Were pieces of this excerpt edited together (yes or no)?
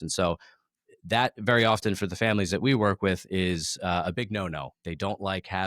no